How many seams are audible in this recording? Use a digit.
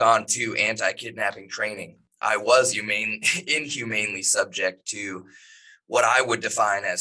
1